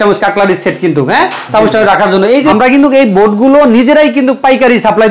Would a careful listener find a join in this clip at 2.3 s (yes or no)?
yes